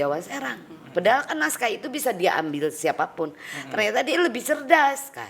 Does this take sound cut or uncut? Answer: uncut